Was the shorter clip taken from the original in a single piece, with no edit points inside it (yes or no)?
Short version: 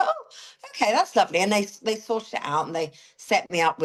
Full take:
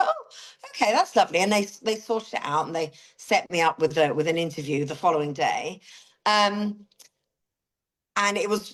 yes